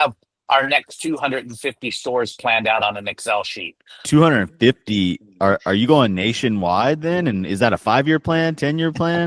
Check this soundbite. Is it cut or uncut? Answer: cut